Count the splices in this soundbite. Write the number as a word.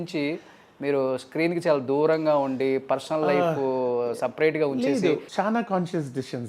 one